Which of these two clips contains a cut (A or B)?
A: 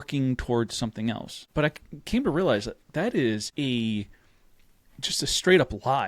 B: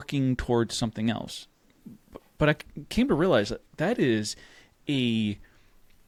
A